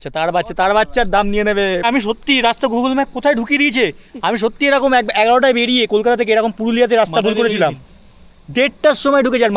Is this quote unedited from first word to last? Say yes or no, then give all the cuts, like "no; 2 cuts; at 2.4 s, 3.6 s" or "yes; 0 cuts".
no; 1 cut; at 1.8 s